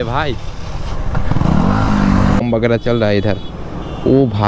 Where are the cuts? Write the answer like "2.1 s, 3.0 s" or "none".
2.4 s